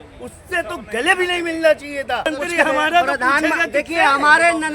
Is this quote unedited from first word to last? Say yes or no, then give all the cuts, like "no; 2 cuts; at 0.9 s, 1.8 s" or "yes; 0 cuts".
no; 1 cut; at 2.3 s